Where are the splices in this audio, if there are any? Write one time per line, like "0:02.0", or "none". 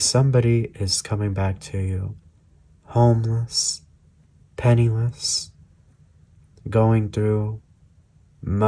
none